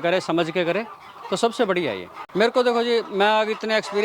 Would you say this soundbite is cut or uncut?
cut